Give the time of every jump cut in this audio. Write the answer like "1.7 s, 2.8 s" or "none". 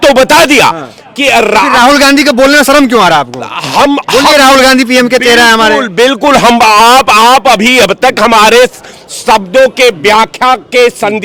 none

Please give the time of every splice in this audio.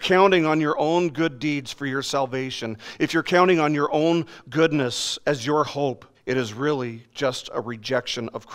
6.1 s

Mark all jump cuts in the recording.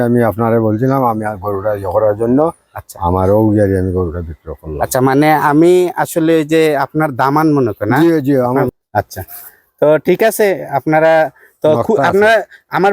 8.7 s

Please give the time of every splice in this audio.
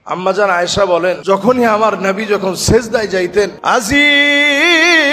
1.2 s, 3.6 s

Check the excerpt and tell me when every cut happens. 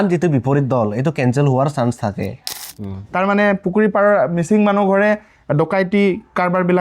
2.7 s

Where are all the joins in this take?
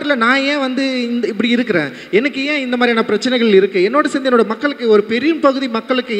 none

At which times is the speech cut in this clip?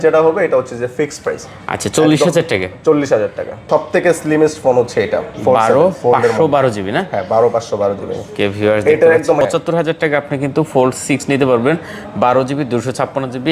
3.6 s, 9.4 s

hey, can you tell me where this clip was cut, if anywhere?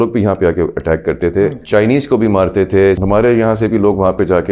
1.6 s, 3.0 s

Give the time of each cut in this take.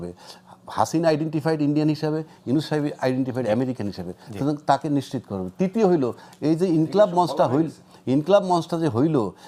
none

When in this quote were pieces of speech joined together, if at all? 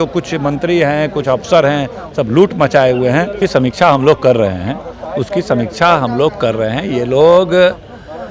3.4 s

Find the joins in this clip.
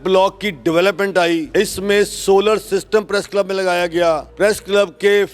1.5 s, 4.3 s

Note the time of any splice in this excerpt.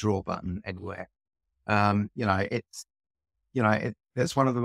none

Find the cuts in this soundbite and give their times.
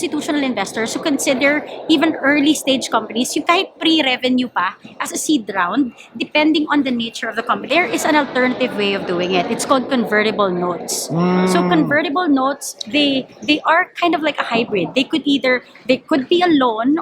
7.6 s

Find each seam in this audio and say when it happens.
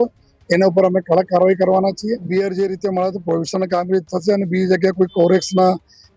2.3 s

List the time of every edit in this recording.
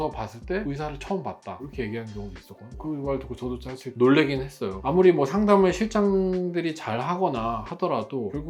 none

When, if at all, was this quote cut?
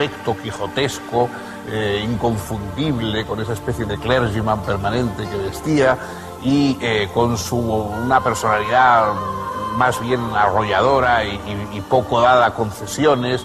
7.6 s

